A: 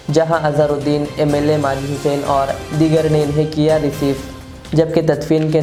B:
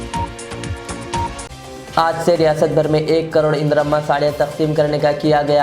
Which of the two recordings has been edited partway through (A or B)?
B